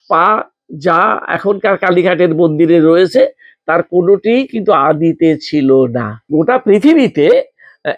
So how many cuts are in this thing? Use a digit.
1